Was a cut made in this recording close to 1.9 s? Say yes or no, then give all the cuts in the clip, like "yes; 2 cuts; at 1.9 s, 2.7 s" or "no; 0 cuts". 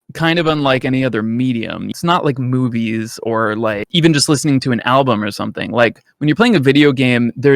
yes; 2 cuts; at 1.9 s, 3.9 s